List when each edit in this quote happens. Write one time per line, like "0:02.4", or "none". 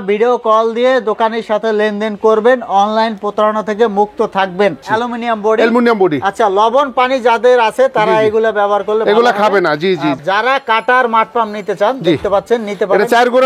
0:04.8
0:10.2